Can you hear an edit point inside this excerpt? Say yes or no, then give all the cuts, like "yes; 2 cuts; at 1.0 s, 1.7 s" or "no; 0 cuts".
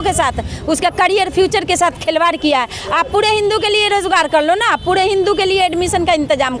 no; 0 cuts